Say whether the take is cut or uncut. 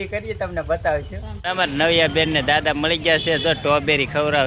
uncut